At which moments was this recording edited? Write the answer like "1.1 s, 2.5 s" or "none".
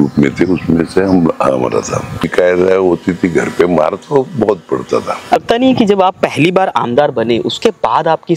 2.2 s, 5.4 s